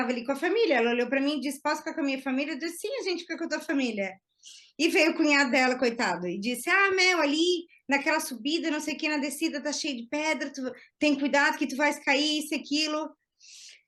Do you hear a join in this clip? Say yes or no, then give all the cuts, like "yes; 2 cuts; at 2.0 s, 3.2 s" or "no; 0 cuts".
no; 0 cuts